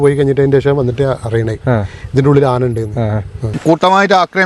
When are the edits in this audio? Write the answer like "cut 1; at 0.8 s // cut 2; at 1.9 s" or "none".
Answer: cut 1; at 3.5 s

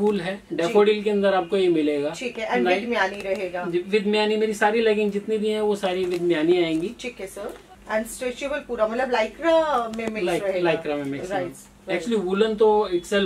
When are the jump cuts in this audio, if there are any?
cut 1; at 7.7 s

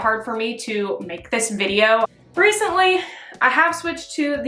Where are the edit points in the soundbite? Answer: cut 1; at 2.1 s

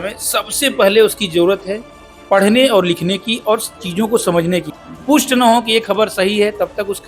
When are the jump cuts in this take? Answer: cut 1; at 4.9 s

